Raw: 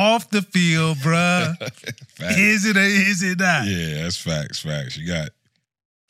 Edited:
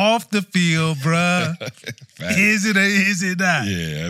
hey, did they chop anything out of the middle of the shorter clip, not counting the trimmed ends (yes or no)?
no